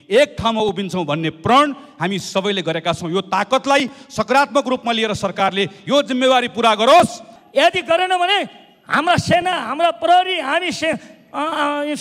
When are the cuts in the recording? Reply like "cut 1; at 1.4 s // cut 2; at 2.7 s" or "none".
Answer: cut 1; at 7.3 s